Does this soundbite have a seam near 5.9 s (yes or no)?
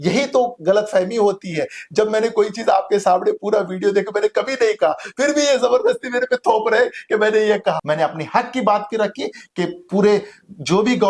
no